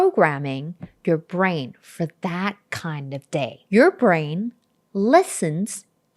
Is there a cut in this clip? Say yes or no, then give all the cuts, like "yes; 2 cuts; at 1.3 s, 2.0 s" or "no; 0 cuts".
yes; 1 cut; at 3.6 s